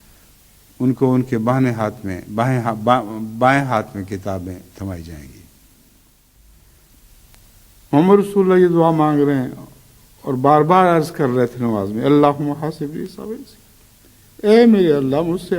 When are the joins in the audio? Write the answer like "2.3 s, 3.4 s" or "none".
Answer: 6.3 s